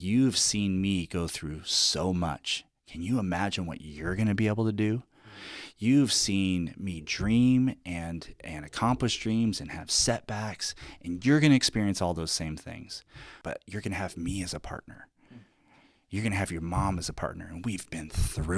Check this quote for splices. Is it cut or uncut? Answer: cut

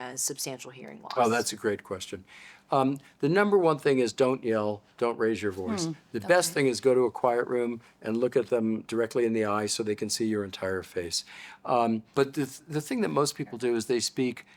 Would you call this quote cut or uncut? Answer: cut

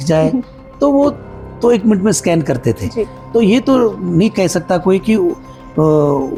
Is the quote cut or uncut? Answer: uncut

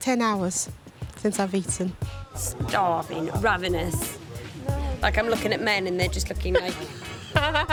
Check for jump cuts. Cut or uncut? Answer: uncut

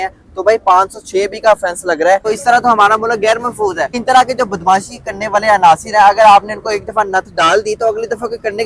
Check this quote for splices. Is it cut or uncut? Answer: cut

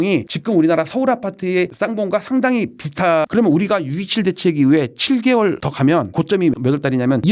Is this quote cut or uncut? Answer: uncut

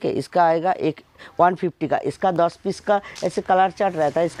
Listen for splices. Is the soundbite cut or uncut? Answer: uncut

